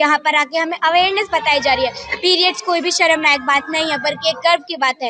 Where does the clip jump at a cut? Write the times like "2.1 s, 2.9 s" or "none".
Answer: none